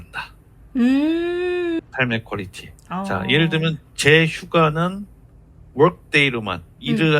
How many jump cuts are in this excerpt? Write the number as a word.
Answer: one